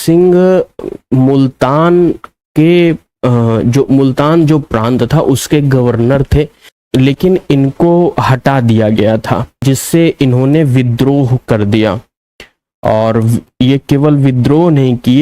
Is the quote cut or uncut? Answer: cut